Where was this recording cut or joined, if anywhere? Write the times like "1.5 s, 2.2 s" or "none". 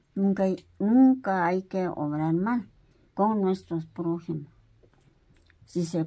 none